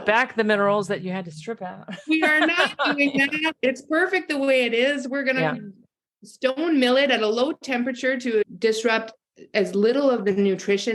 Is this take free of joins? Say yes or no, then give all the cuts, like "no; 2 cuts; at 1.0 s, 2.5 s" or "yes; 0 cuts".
no; 1 cut; at 8.4 s